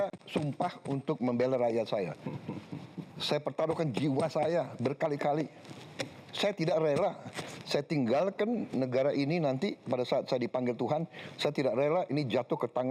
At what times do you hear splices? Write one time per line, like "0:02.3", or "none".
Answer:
none